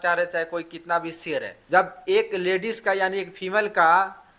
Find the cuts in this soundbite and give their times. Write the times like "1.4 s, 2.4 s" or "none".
1.6 s